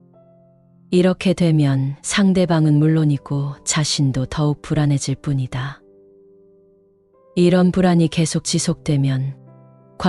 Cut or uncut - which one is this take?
uncut